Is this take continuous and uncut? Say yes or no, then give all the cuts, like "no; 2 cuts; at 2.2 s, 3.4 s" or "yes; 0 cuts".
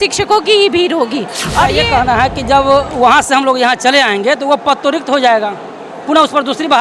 no; 1 cut; at 1.8 s